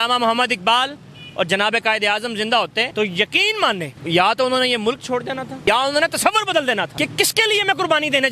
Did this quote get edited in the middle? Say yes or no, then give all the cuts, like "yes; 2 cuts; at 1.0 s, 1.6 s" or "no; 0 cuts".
yes; 4 cuts; at 2.9 s, 3.9 s, 5.6 s, 6.9 s